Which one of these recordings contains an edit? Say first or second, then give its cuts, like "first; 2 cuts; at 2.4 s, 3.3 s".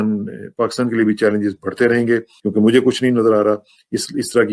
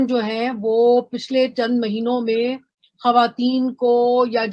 first; 1 cut; at 2.3 s